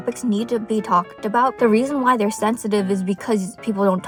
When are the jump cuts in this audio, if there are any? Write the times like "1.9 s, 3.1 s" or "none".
none